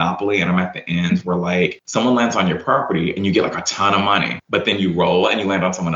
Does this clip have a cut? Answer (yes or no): no